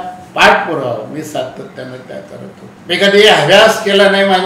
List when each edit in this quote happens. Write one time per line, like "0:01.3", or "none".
0:02.7